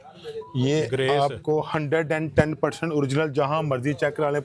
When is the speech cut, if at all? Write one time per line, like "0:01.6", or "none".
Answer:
none